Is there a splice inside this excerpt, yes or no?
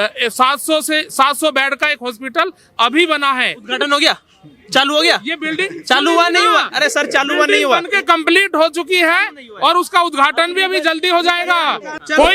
no